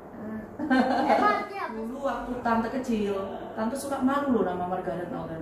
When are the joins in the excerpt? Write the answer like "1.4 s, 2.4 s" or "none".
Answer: 1.8 s